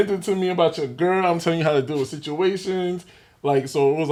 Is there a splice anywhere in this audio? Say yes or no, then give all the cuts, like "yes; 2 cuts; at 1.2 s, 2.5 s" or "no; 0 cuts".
no; 0 cuts